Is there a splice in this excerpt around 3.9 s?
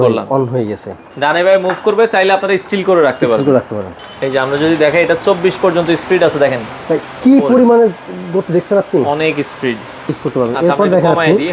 yes; 3 cuts; at 1.0 s, 3.9 s, 10.2 s

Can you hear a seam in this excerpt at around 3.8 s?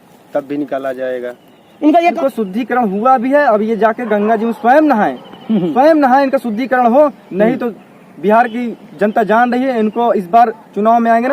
no; 1 cut; at 2.2 s

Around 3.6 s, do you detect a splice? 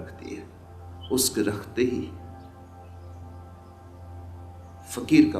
no; 0 cuts

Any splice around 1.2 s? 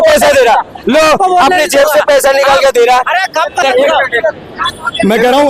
no; 1 cut; at 3.6 s

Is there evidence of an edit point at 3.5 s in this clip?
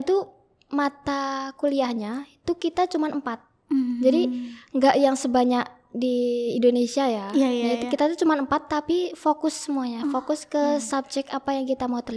no; 0 cuts

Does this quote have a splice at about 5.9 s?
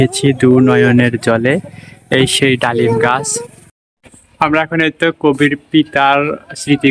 no; 1 cut; at 4.2 s

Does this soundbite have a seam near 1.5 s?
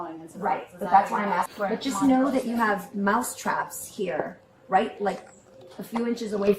yes; 1 cut; at 1.5 s

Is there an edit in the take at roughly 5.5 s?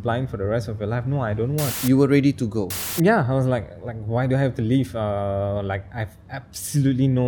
no; 2 cuts; at 1.7 s, 2.8 s

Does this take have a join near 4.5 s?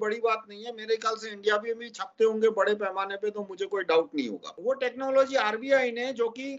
yes; 1 cut; at 4.5 s

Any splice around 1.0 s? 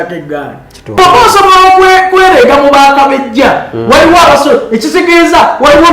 yes; 1 cut; at 1.0 s

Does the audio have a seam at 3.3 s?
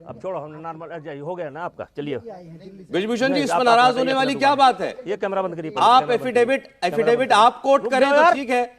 no; 1 cut; at 6.9 s

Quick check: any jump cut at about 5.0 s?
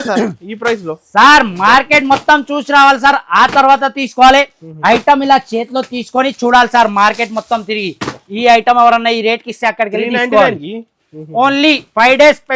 no; 0 cuts

